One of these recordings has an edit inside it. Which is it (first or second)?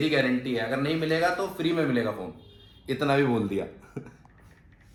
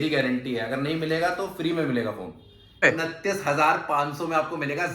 second